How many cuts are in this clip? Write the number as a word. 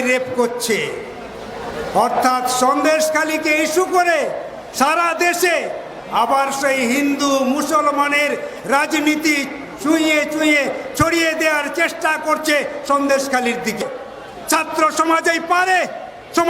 one